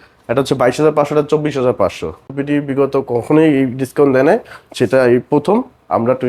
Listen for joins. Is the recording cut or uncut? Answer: cut